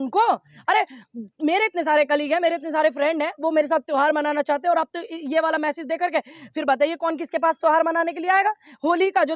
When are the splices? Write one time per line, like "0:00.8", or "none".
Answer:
none